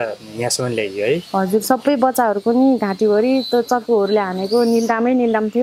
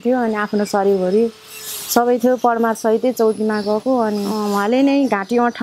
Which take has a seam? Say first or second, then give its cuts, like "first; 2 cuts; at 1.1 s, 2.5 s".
second; 1 cut; at 4.4 s